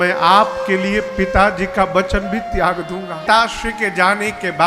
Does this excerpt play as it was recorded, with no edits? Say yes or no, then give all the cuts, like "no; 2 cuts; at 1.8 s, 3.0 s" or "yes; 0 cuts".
no; 1 cut; at 3.2 s